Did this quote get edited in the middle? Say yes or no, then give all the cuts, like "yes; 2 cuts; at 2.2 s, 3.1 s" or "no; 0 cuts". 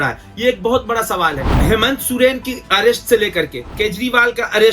yes; 2 cuts; at 1.5 s, 3.6 s